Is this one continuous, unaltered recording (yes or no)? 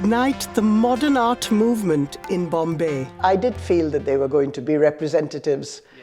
no